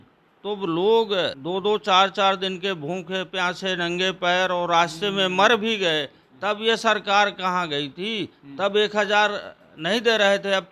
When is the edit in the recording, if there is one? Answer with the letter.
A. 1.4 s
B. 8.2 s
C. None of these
A